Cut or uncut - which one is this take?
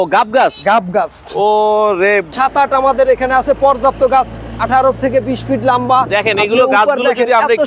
cut